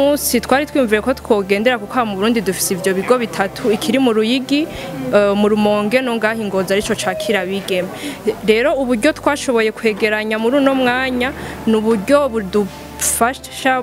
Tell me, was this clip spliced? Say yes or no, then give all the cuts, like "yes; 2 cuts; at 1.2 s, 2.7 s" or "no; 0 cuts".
no; 0 cuts